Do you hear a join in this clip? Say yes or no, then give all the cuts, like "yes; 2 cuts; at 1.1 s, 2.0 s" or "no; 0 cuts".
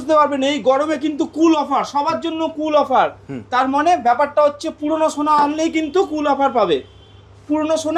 no; 0 cuts